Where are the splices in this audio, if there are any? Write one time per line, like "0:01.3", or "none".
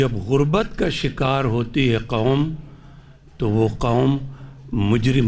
none